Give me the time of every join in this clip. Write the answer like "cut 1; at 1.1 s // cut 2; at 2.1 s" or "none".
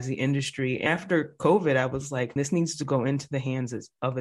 cut 1; at 0.9 s // cut 2; at 2.3 s